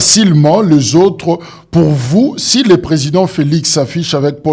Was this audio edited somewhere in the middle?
no; 0 cuts

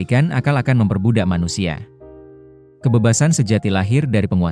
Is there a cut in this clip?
no; 0 cuts

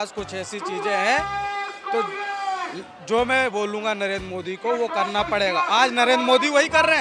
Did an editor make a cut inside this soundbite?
no; 0 cuts

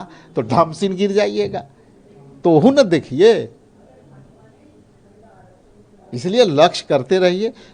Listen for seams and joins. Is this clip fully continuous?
yes; 0 cuts

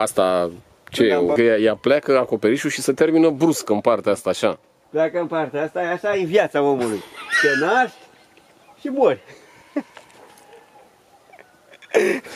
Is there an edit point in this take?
yes; 1 cut; at 1.4 s

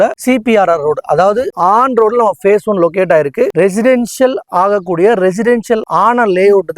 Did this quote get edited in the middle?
yes; 3 cuts; at 1.5 s, 3.5 s, 5.9 s

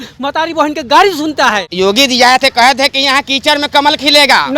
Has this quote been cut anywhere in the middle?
yes; 1 cut; at 1.7 s

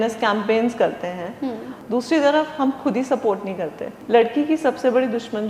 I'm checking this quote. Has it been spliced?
yes; 2 cuts; at 1.8 s, 3.9 s

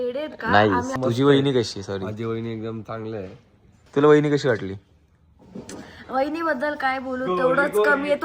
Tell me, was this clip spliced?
yes; 2 cuts; at 0.9 s, 3.8 s

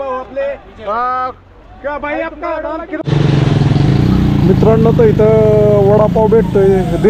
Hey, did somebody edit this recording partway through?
yes; 1 cut; at 3.0 s

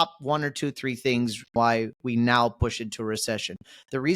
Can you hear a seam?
yes; 1 cut; at 1.5 s

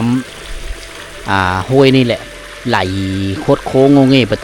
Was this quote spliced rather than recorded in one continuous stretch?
no; 0 cuts

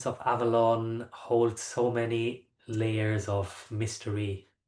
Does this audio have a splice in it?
no; 0 cuts

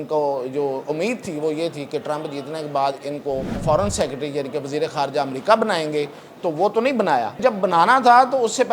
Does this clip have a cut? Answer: yes; 2 cuts; at 3.6 s, 7.4 s

